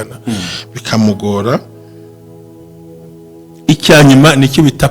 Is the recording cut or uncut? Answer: cut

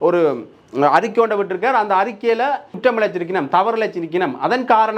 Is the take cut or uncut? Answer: cut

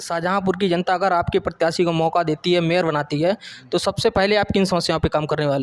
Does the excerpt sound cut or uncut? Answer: uncut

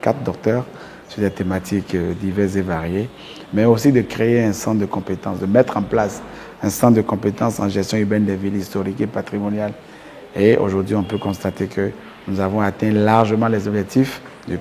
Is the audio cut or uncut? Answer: uncut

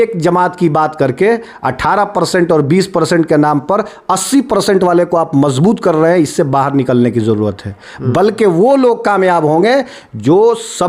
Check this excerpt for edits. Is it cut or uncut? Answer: uncut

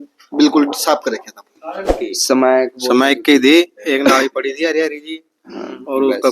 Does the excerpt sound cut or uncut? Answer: cut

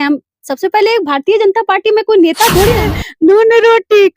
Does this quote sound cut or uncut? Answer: cut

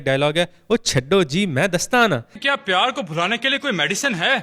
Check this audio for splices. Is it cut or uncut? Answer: cut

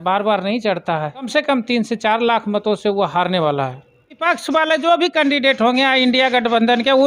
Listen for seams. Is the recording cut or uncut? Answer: cut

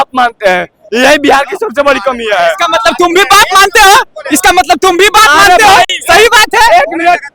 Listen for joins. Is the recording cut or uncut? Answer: uncut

